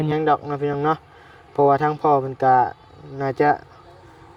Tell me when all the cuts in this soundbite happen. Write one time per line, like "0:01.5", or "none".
none